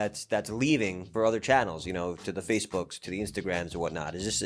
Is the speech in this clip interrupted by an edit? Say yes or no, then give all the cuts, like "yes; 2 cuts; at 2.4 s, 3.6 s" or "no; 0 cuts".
yes; 1 cut; at 1.1 s